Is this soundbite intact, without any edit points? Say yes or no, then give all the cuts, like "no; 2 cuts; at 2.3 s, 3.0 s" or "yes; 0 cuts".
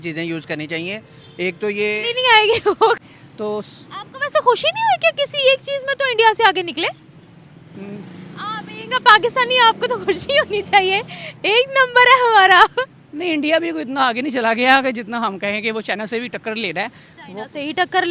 no; 1 cut; at 3.0 s